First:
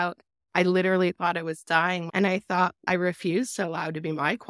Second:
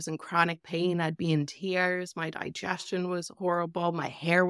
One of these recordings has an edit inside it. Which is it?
first; 2 cuts; at 2.1 s, 2.8 s

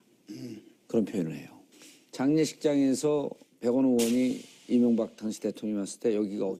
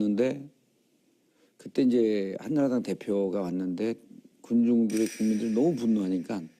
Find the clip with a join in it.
second; 1 cut; at 4.4 s

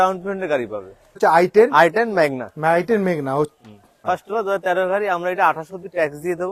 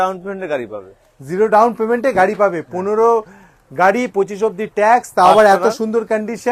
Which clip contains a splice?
first; 2 cuts; at 1.1 s, 3.9 s

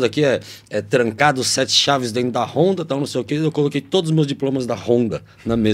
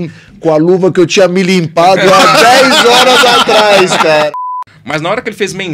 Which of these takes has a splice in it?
second; 1 cut; at 4.3 s

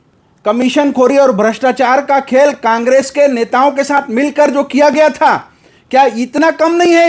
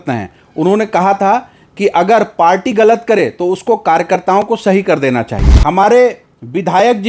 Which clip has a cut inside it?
second; 1 cut; at 5.4 s

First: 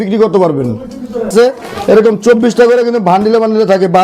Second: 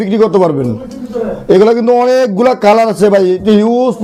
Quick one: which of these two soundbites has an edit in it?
first; 1 cut; at 1.3 s

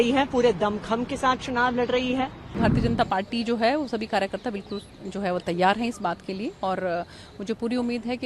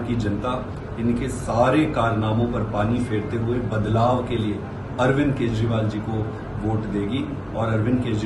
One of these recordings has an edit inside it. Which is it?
first; 1 cut; at 2.6 s

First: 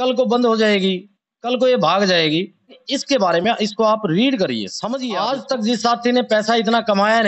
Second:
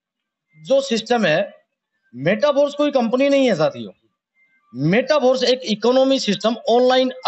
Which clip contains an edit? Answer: first; 2 cuts; at 2.9 s, 5.1 s

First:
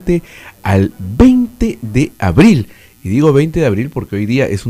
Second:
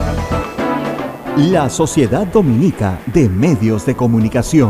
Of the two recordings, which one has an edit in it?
second; 1 cut; at 1.0 s

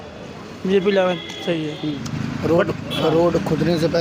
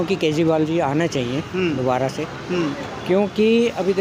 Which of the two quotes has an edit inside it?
first; 1 cut; at 2.0 s

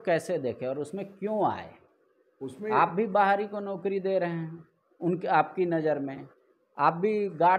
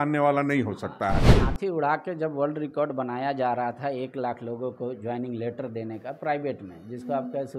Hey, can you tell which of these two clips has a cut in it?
second; 1 cut; at 1.4 s

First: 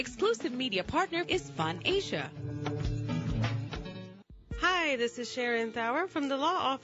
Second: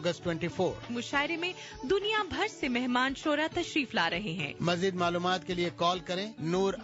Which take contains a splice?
first; 1 cut; at 4.2 s

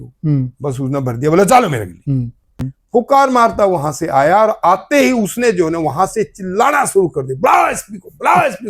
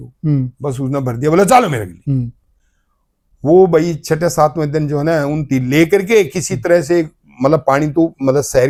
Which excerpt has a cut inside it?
first; 1 cut; at 2.7 s

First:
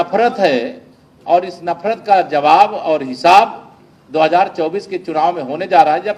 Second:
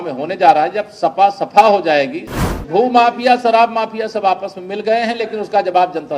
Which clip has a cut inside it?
second; 1 cut; at 2.5 s

